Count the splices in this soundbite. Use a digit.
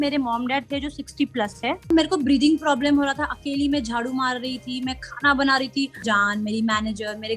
2